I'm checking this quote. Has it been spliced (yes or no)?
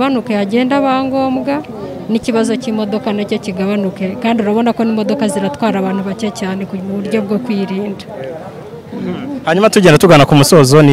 no